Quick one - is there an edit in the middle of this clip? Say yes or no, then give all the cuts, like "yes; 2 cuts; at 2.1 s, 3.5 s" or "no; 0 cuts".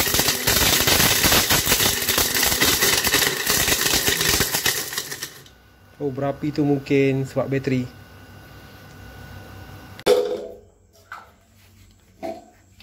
yes; 1 cut; at 10.1 s